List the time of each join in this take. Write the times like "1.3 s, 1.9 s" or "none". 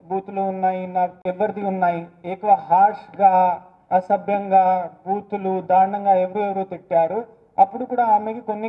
1.1 s

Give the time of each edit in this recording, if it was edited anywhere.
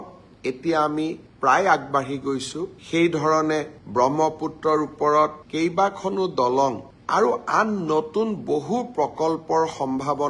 2.6 s

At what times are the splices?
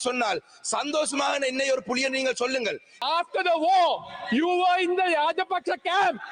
2.9 s

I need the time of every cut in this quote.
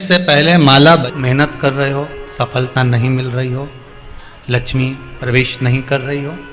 1.0 s

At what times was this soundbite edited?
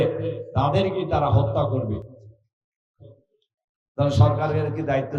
none

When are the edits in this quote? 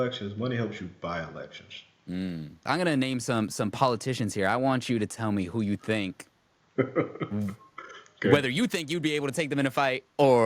2.6 s

